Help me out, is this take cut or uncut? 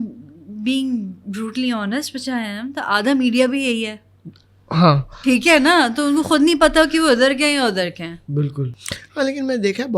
cut